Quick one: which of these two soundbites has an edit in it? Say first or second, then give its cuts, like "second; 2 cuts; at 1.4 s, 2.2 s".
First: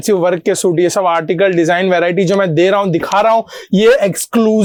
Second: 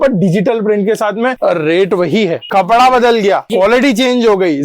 second; 3 cuts; at 1.4 s, 2.4 s, 3.5 s